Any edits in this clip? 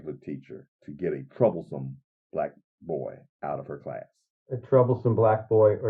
no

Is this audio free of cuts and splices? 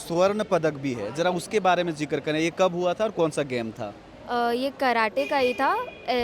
yes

